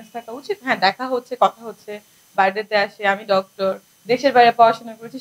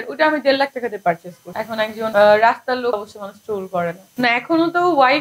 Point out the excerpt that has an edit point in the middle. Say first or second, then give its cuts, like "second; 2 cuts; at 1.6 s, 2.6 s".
second; 3 cuts; at 1.7 s, 2.9 s, 4.0 s